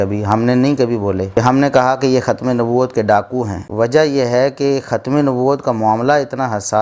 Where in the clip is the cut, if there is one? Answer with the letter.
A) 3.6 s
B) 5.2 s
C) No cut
A